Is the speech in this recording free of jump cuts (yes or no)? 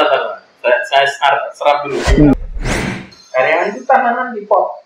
no